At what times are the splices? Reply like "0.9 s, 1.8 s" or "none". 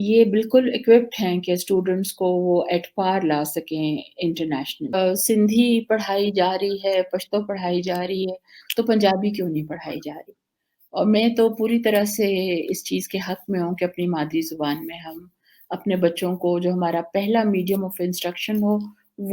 5.0 s